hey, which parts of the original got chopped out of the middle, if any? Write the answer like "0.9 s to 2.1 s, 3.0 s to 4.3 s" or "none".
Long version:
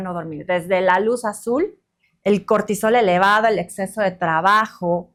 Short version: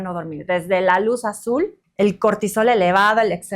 1.8 s to 2.1 s